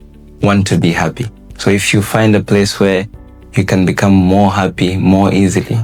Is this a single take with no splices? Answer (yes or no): yes